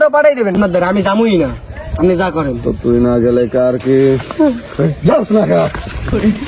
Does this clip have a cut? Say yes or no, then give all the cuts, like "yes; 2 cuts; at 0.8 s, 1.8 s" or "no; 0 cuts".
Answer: no; 0 cuts